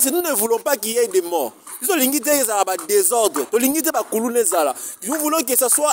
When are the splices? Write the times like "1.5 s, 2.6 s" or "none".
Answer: none